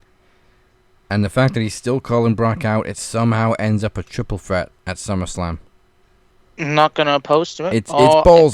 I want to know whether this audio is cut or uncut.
cut